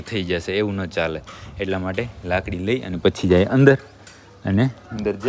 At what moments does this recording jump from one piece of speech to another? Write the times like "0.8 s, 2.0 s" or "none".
none